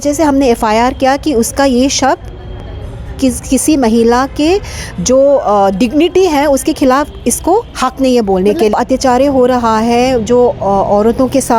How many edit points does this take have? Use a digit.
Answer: 1